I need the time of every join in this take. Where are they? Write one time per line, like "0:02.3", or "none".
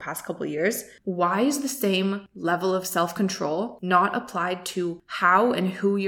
0:00.9
0:02.3
0:03.8
0:05.1